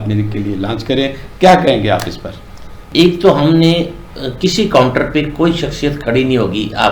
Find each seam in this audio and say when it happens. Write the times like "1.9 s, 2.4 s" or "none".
2.8 s